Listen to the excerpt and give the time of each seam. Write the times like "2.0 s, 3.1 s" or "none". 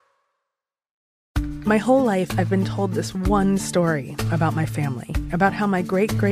1.2 s